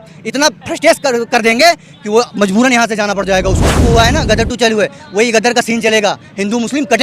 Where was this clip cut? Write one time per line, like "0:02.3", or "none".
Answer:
0:03.8